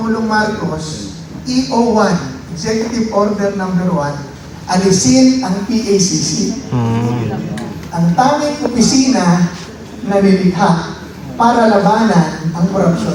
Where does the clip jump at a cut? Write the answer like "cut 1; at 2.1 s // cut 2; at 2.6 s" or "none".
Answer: none